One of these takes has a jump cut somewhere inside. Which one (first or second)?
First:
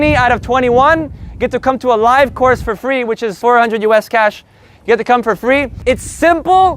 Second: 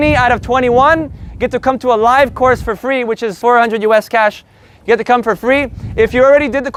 first